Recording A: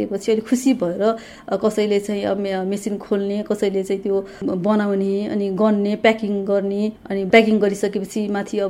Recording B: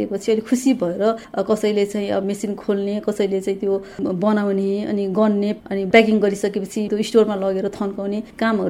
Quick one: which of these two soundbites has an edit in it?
B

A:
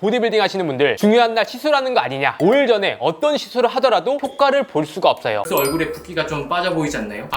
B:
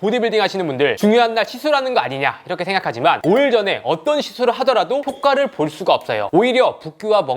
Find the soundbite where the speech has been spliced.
A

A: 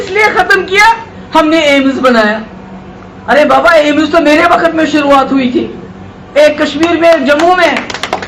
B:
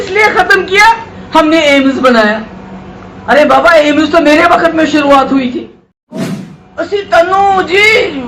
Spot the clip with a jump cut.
B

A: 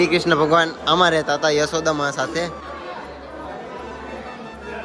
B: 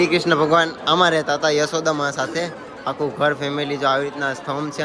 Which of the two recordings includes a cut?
A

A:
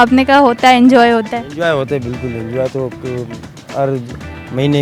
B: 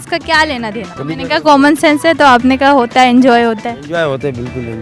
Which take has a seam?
B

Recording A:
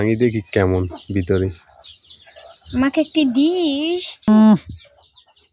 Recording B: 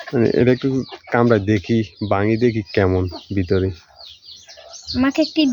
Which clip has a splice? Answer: A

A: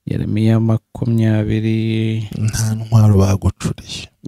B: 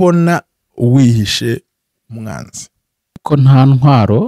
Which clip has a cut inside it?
B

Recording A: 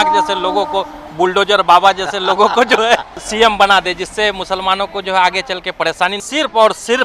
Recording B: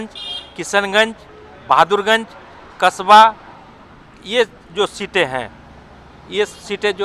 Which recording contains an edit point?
A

